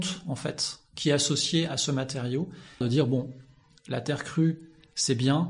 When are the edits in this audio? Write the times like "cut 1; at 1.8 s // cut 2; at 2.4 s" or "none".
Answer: cut 1; at 2.8 s